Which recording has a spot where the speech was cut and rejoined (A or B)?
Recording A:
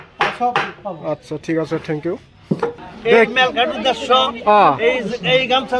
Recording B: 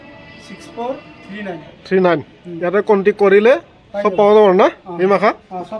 A